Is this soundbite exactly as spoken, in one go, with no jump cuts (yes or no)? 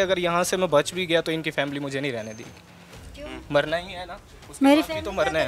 yes